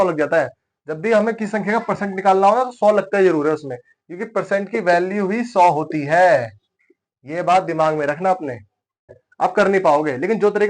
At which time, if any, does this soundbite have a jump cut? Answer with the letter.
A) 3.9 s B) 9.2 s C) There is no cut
B